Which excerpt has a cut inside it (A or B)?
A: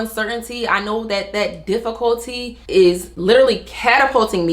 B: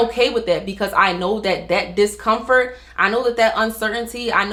A